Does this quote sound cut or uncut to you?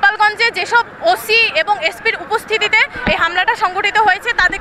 uncut